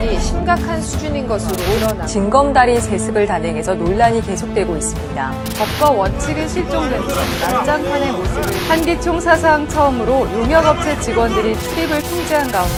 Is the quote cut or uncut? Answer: uncut